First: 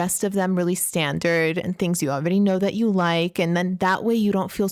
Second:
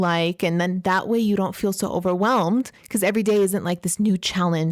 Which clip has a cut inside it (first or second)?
second